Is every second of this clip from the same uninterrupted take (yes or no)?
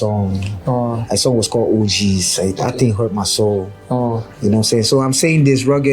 yes